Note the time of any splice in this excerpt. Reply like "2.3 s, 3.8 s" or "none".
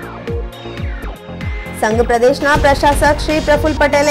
none